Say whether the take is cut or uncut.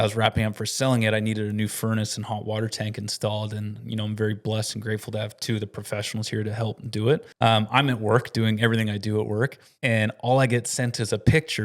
cut